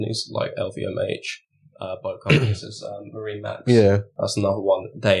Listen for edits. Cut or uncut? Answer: uncut